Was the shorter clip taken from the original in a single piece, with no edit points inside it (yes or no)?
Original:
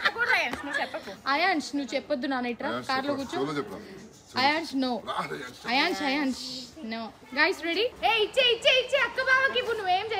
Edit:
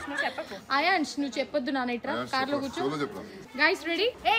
no